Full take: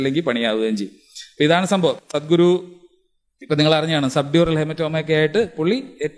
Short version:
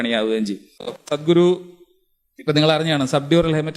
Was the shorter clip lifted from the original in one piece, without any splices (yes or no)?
no